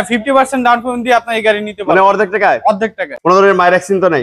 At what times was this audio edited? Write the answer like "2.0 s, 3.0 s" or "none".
3.1 s